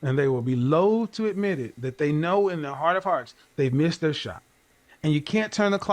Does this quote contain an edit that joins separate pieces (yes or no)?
no